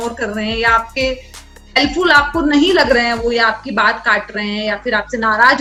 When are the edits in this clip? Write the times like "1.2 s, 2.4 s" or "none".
none